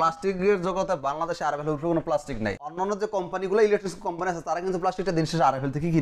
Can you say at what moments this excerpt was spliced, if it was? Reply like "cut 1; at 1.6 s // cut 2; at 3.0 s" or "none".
cut 1; at 2.7 s